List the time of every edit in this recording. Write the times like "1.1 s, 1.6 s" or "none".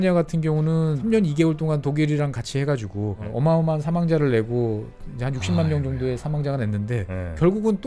1.0 s, 3.3 s